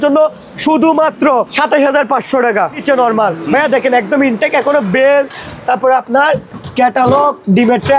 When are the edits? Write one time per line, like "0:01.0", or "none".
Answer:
0:01.5
0:02.8